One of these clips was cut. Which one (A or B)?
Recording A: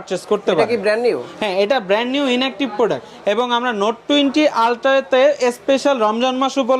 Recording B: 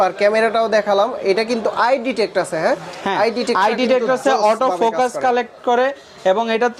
A